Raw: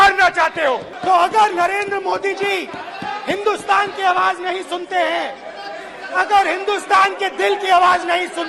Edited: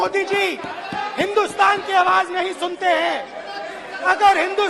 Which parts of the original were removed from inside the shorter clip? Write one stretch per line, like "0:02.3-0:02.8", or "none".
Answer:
none